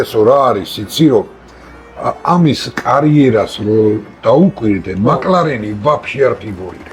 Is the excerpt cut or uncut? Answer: uncut